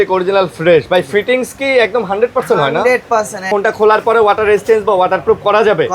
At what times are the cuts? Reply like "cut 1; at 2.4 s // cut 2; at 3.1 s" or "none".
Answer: cut 1; at 3.5 s